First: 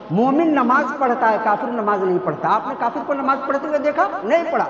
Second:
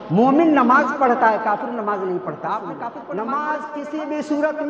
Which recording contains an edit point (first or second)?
second